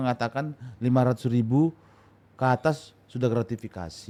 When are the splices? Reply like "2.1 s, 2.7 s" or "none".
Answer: none